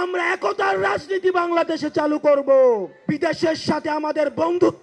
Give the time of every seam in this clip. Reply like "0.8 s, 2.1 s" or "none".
2.9 s